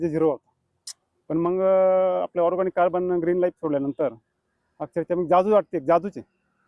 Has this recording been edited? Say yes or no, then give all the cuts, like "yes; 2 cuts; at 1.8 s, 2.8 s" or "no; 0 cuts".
no; 0 cuts